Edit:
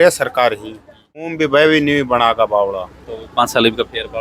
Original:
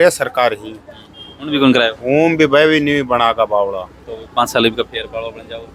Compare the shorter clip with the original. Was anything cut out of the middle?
yes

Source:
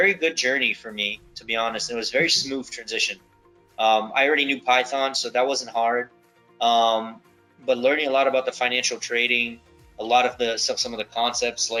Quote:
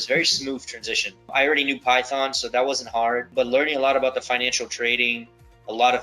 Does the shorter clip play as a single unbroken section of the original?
no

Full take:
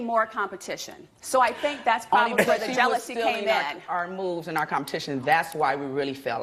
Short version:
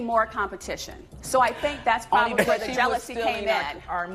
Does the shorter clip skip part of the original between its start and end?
no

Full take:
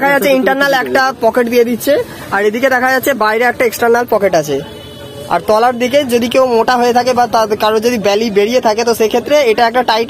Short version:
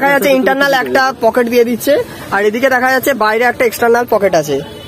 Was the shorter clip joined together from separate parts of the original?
no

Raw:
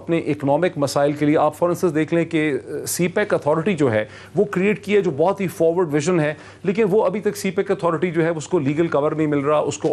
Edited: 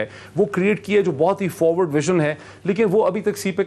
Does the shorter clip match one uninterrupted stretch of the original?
yes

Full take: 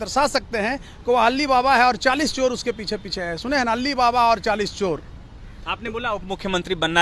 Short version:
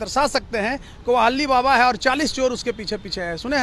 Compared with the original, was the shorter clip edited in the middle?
no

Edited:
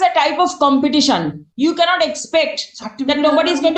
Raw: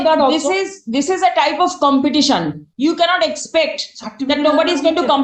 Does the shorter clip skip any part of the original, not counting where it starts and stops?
no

